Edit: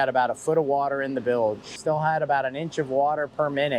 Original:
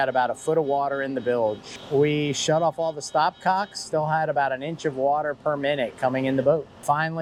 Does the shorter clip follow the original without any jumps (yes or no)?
no